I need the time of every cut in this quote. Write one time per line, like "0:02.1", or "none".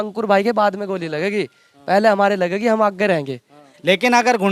0:03.6